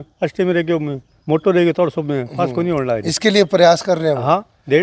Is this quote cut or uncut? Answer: uncut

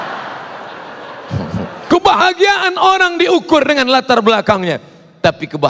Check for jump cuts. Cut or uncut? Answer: cut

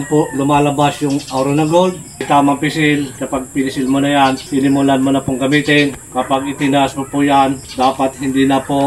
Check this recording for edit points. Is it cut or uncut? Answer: cut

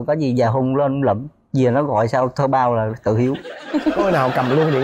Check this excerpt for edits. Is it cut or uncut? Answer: uncut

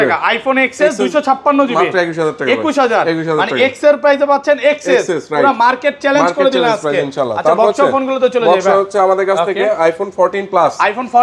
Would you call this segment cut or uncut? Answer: uncut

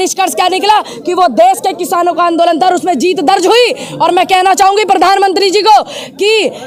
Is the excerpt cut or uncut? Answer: uncut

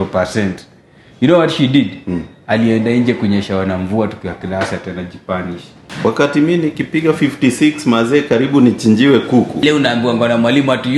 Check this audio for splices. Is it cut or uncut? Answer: cut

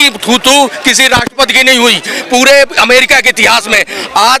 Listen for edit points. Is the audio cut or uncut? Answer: uncut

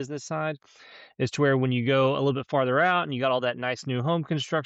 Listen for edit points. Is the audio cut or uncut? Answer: uncut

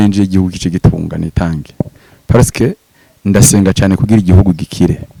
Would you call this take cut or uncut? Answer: uncut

